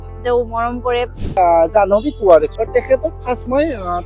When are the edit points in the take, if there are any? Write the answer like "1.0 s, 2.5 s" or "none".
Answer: 1.3 s, 2.5 s